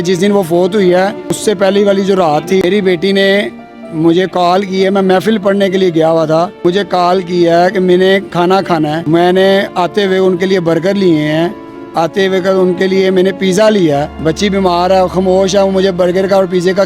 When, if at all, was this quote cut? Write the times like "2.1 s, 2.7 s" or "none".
1.3 s, 2.6 s, 6.5 s, 9.0 s, 14.1 s